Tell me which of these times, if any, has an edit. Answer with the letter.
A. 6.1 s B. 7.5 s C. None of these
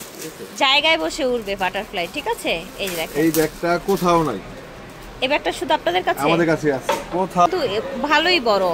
B